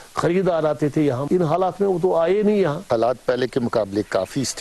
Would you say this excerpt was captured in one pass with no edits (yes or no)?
no